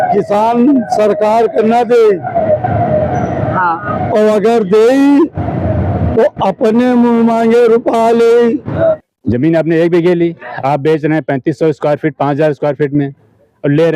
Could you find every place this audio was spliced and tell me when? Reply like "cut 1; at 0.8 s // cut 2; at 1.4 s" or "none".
cut 1; at 8.7 s